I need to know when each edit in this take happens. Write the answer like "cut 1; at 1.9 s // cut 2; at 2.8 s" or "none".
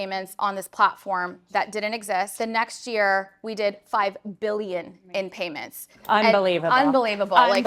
cut 1; at 2.3 s